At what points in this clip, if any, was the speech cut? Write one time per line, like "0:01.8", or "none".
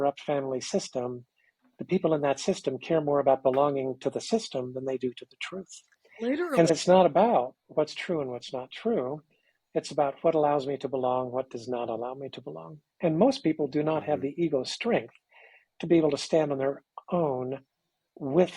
0:06.7